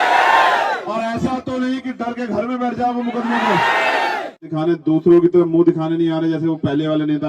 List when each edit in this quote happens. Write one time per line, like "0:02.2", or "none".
0:04.5